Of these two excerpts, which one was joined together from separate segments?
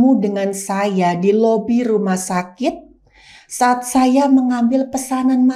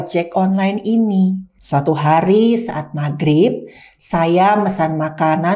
second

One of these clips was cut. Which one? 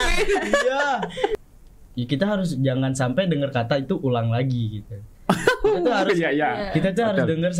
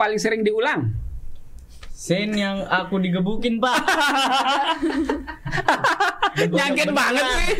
first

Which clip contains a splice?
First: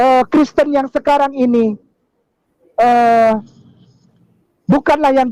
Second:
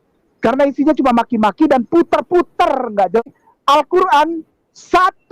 second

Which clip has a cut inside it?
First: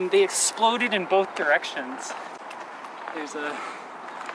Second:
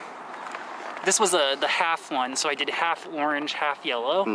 first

